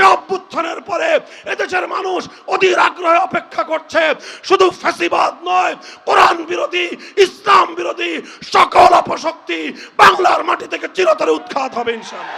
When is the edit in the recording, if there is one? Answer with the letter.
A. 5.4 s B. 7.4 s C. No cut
C